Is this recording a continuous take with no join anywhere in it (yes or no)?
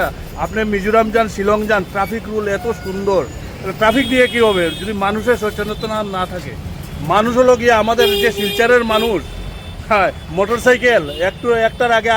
yes